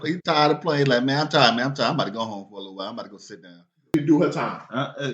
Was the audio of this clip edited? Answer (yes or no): yes